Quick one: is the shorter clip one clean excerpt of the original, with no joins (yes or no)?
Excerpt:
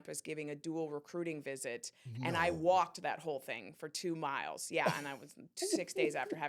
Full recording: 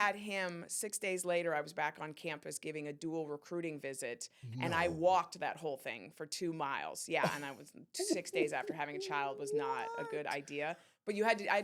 yes